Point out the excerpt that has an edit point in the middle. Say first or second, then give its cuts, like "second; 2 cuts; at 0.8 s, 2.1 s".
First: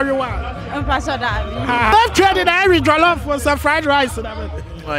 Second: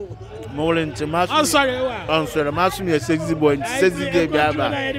first; 1 cut; at 1.9 s